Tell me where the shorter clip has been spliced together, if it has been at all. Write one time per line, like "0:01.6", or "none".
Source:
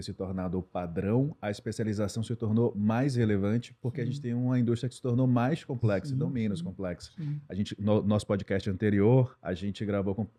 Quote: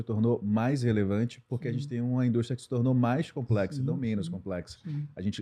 none